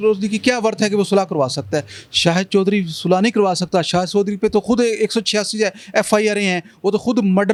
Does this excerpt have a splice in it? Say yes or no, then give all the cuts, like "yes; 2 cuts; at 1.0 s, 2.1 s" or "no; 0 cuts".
no; 0 cuts